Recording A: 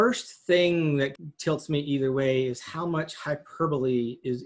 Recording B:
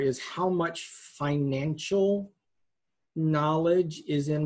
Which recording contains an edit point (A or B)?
A